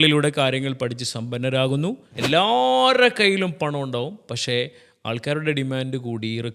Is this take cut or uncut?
cut